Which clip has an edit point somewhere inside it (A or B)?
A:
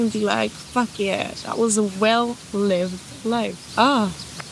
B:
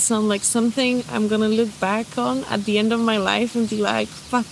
A